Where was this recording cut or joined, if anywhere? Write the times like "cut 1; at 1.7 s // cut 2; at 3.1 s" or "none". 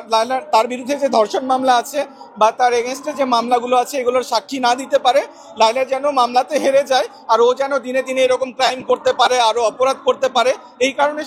none

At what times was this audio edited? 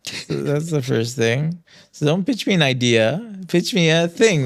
none

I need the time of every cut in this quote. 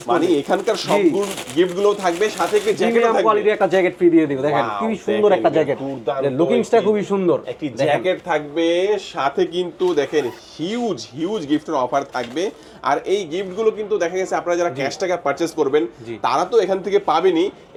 none

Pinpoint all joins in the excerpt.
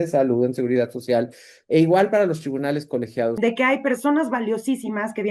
cut 1; at 3.4 s

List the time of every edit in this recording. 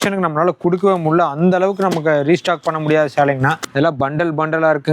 cut 1; at 3.7 s

